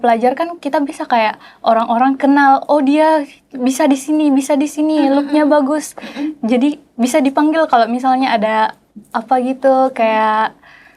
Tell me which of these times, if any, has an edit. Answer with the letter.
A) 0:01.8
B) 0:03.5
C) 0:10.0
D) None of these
D